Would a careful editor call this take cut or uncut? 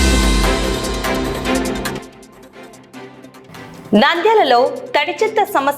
cut